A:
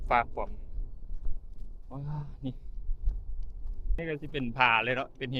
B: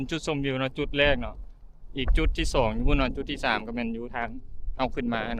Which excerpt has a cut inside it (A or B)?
A